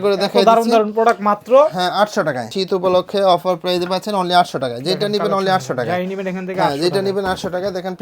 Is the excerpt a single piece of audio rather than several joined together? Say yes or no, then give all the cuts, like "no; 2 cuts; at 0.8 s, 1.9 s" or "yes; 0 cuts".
no; 1 cut; at 2.5 s